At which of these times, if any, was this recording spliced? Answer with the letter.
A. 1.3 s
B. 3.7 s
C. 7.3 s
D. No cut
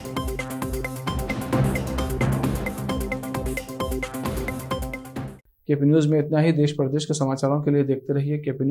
D